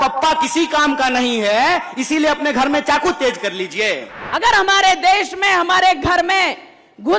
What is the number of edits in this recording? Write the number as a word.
one